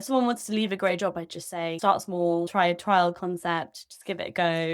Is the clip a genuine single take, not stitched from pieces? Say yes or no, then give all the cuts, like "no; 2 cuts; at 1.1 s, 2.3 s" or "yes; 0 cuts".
no; 2 cuts; at 1.8 s, 2.5 s